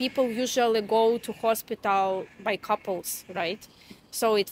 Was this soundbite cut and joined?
no; 0 cuts

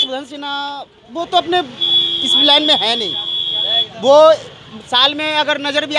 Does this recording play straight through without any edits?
yes; 0 cuts

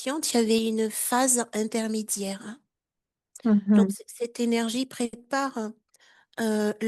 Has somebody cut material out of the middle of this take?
no; 0 cuts

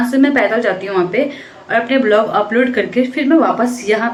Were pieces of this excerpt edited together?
no; 0 cuts

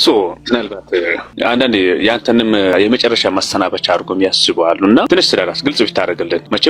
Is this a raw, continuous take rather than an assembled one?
no; 2 cuts; at 1.3 s, 2.7 s

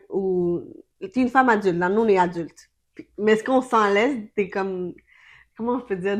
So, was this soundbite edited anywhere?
no; 0 cuts

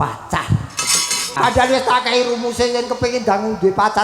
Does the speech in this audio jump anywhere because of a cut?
yes; 1 cut; at 1.3 s

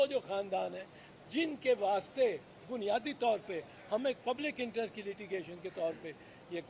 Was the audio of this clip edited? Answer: no; 0 cuts

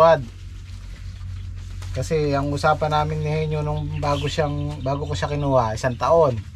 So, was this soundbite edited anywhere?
no; 0 cuts

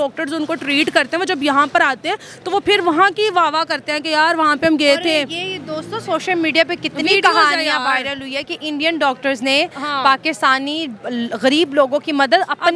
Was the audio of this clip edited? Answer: no; 0 cuts

